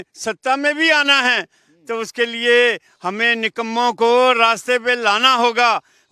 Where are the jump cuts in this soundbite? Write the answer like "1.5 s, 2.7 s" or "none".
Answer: none